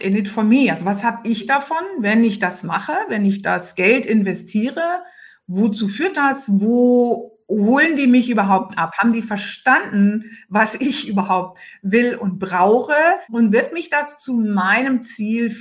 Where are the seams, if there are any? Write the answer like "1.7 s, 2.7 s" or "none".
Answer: 13.2 s